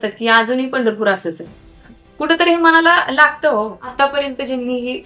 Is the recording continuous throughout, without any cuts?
no; 1 cut; at 3.9 s

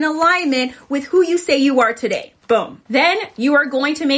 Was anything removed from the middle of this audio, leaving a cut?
yes; 1 cut; at 2.8 s

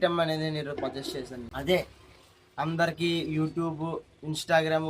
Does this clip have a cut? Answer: yes; 1 cut; at 1.4 s

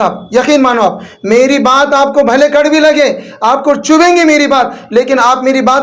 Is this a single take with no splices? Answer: yes; 0 cuts

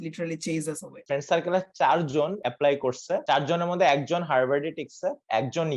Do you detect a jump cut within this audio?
yes; 3 cuts; at 0.9 s, 2.4 s, 3.2 s

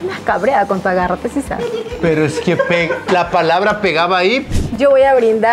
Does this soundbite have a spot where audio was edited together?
yes; 1 cut; at 4.6 s

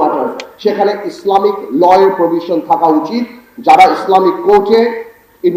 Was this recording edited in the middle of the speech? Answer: no; 0 cuts

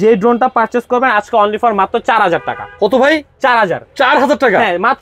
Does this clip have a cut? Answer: no; 0 cuts

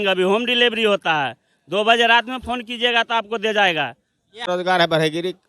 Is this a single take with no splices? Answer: no; 1 cut; at 4.5 s

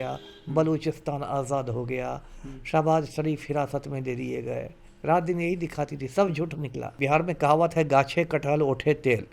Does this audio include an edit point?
yes; 1 cut; at 7.0 s

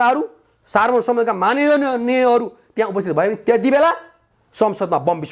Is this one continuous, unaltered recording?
yes; 0 cuts

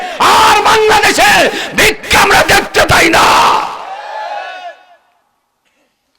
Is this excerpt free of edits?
yes; 0 cuts

